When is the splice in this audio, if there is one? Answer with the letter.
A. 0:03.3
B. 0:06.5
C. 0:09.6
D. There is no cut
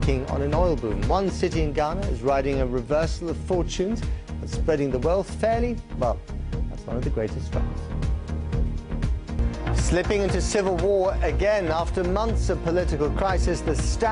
C